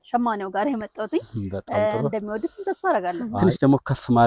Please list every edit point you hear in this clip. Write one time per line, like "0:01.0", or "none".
0:03.2